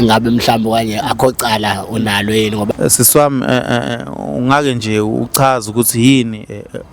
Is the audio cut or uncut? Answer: cut